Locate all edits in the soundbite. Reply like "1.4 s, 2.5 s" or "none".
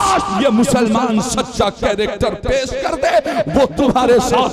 none